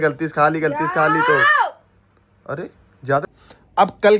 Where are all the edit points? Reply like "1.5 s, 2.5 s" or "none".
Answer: 3.2 s